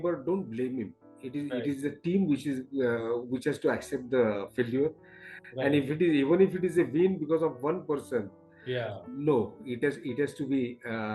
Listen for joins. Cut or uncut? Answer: uncut